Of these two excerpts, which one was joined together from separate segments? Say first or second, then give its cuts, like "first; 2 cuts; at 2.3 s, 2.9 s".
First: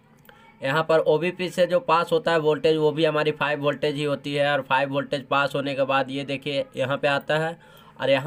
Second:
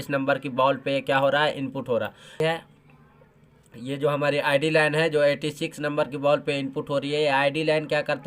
second; 1 cut; at 2.3 s